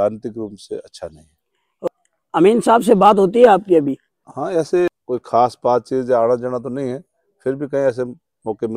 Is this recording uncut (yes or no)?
no